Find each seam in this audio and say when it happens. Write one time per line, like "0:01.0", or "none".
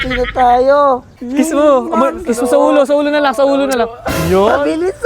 0:01.2